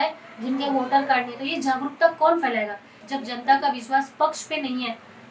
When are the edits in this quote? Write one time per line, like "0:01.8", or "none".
0:02.9